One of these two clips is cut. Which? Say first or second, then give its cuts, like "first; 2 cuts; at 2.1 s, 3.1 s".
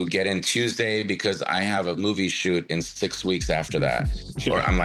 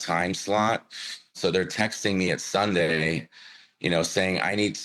second; 1 cut; at 1.4 s